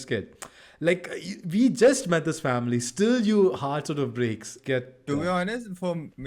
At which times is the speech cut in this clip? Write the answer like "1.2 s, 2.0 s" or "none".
4.5 s